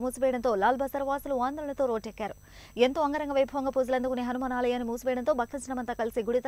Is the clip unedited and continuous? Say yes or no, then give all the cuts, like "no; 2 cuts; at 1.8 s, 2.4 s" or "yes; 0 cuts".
yes; 0 cuts